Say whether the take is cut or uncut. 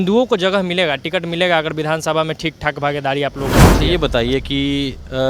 cut